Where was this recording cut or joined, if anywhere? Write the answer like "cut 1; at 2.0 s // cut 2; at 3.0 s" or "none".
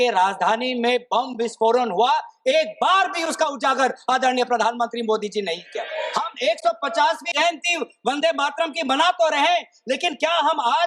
cut 1; at 5.9 s // cut 2; at 7.3 s

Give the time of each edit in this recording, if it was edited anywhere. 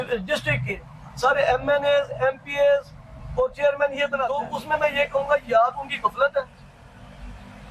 cut 1; at 4.4 s

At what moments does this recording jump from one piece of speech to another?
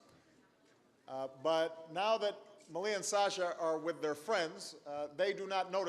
cut 1; at 3.2 s

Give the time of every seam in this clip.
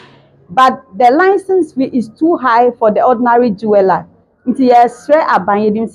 none

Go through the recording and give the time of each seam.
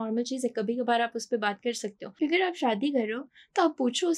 cut 1; at 2.0 s

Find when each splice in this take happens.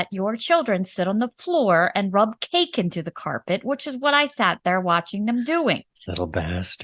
none

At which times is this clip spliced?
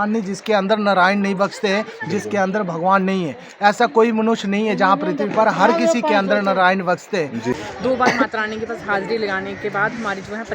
cut 1; at 7.5 s

